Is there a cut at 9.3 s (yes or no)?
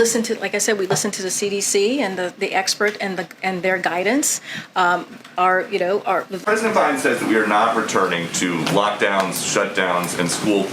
no